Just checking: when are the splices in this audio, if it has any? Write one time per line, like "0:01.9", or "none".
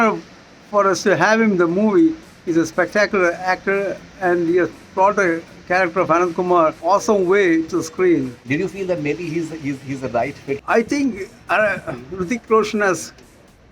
0:06.8
0:08.3
0:10.6